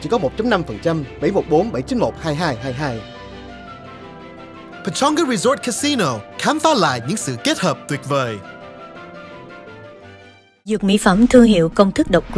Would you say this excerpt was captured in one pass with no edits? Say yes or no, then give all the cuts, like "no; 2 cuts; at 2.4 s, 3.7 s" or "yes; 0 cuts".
yes; 0 cuts